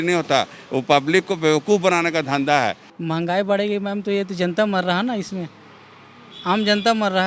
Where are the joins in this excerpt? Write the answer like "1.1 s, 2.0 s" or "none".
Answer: 2.9 s